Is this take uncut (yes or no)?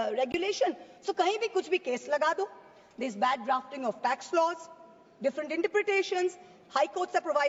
yes